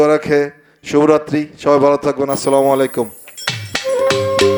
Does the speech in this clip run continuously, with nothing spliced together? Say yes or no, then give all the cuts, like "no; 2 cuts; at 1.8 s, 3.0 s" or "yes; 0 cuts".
yes; 0 cuts